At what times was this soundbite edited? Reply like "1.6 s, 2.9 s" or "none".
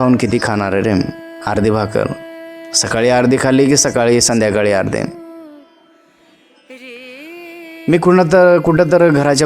5.1 s, 7.6 s